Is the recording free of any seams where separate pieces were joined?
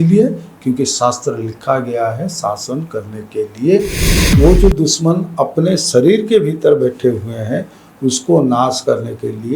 no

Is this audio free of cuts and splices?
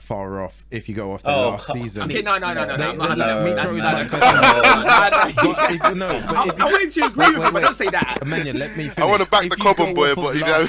yes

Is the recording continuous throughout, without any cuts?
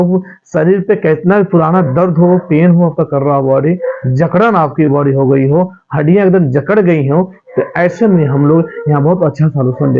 yes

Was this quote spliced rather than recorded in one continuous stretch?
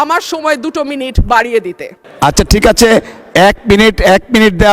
yes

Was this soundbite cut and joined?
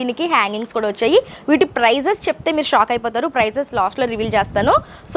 no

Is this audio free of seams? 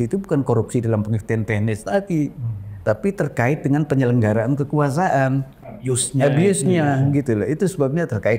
yes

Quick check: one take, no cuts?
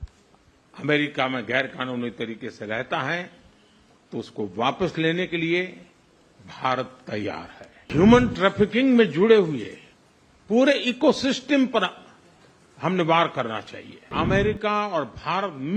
no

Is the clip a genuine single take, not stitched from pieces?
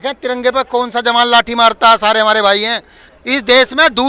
no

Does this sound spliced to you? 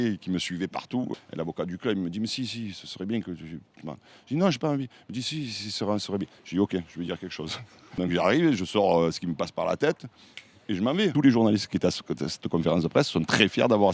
yes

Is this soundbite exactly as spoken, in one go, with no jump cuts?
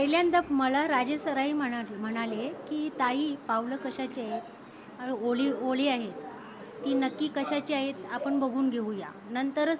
yes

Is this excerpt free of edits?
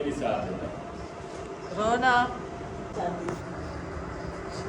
no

